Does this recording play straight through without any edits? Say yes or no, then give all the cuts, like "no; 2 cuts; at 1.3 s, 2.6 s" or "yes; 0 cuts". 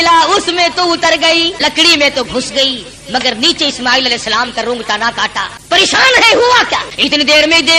no; 3 cuts; at 1.6 s, 5.6 s, 6.9 s